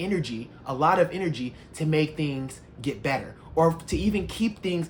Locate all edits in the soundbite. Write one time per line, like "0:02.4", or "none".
none